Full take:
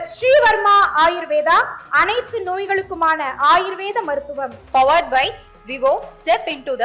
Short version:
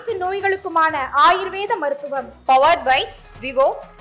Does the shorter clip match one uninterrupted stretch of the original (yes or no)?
yes